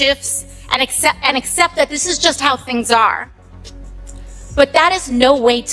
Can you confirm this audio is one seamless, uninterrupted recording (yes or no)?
no